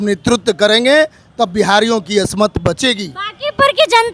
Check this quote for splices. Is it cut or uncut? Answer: uncut